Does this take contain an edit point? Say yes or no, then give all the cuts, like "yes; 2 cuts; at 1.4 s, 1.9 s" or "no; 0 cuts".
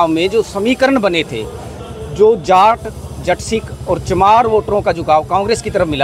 no; 0 cuts